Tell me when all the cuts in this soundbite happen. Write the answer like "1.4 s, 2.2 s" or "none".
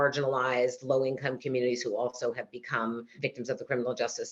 3.1 s